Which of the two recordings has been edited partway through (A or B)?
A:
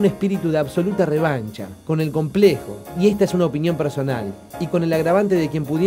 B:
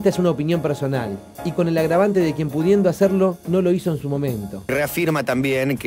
B